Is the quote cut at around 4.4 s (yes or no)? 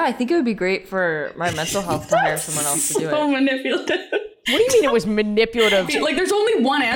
yes